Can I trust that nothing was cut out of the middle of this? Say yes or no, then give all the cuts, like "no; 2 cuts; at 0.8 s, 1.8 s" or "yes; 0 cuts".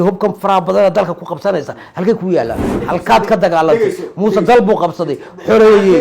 no; 1 cut; at 2.7 s